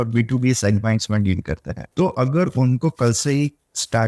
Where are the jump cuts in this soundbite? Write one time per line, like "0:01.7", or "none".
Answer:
0:01.8